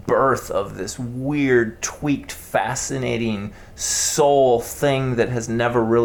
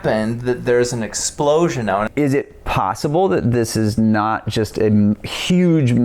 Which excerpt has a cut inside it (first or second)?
second